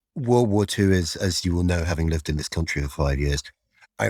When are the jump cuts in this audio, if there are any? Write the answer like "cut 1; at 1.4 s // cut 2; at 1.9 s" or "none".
none